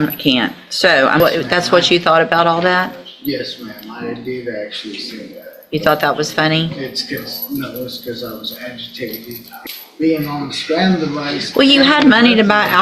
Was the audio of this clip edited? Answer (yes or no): yes